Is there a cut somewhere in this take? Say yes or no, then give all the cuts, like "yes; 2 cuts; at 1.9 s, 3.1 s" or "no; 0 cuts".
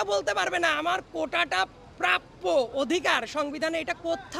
no; 0 cuts